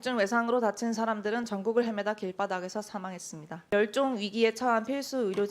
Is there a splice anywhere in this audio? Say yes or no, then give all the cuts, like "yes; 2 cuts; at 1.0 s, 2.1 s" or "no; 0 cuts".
yes; 1 cut; at 3.7 s